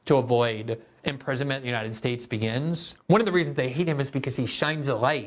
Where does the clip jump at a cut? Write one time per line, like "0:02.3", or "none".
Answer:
0:02.9